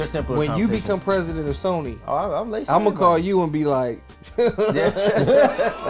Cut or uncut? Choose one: uncut